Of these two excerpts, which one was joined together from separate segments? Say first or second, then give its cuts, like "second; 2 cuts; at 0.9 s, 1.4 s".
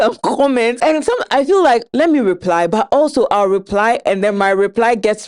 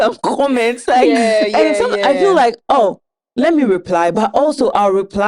first; 2 cuts; at 0.8 s, 1.9 s